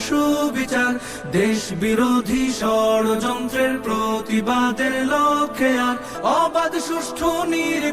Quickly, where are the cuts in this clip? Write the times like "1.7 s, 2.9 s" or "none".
6.1 s